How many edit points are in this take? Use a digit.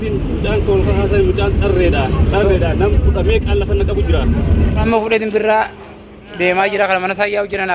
1